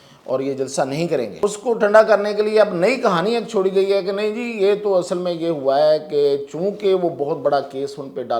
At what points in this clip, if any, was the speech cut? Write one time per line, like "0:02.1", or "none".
0:01.4